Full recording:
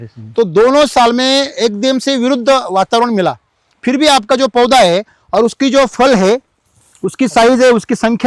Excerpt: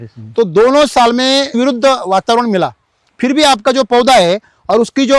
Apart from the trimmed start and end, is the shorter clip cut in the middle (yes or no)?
yes